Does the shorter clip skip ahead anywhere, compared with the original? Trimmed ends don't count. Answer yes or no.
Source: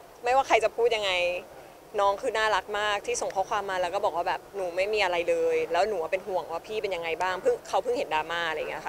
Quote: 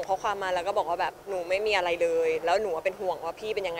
no